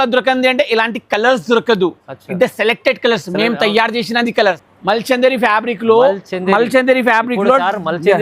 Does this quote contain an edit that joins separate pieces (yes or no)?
yes